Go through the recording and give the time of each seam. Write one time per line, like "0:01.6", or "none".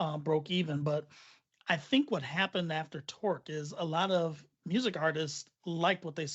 0:04.5